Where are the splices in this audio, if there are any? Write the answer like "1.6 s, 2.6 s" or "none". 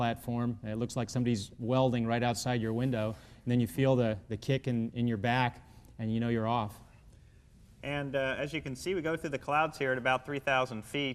2.2 s